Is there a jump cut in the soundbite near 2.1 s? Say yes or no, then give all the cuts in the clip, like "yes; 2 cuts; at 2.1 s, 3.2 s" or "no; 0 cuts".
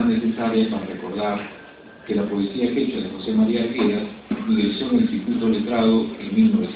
yes; 1 cut; at 2.1 s